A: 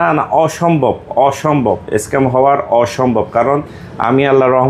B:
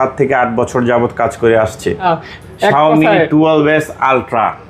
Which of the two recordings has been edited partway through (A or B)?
B